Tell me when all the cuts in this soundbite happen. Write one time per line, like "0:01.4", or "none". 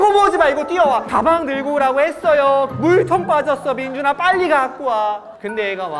0:01.1
0:02.7